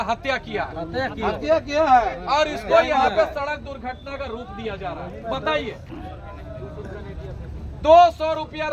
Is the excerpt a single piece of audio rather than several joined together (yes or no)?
yes